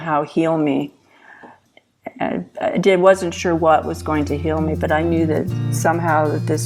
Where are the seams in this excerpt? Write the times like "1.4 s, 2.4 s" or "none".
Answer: 1.5 s